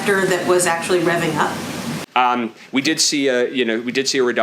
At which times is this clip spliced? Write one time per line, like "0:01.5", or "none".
0:01.9